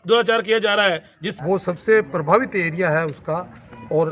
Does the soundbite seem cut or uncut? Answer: cut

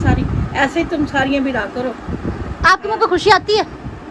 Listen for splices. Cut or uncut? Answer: uncut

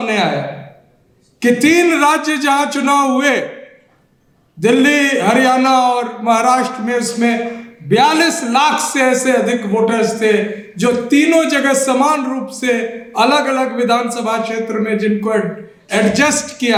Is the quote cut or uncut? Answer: uncut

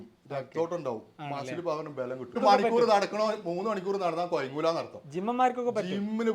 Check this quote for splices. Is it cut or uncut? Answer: cut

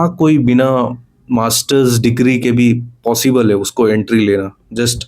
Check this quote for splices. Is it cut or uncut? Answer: uncut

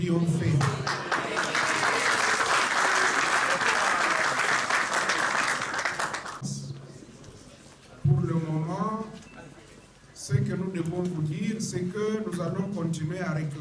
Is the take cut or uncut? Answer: cut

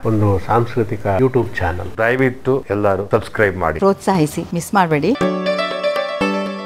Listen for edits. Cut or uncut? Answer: cut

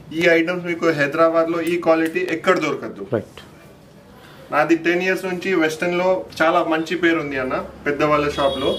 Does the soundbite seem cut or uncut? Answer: uncut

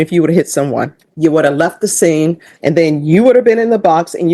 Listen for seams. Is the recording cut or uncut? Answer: cut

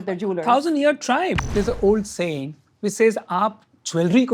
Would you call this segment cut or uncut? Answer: cut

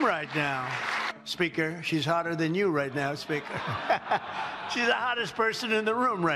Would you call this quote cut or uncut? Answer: cut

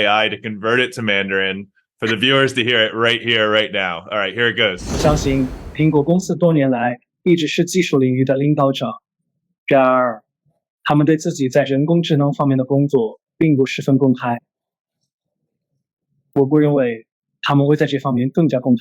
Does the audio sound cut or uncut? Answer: cut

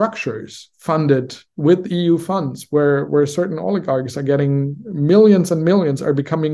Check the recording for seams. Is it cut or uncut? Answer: uncut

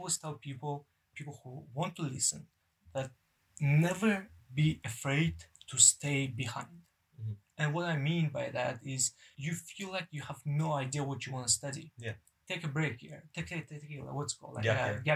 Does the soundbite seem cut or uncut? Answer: cut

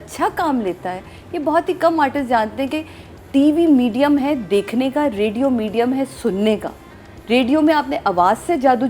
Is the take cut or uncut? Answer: uncut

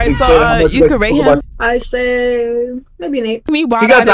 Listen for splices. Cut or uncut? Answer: cut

